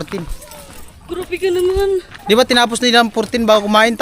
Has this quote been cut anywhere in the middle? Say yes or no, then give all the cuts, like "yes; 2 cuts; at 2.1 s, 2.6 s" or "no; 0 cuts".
yes; 1 cut; at 2.1 s